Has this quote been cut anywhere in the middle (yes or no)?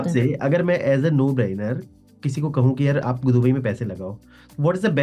no